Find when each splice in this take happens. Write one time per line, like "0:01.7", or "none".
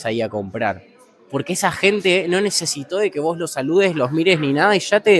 none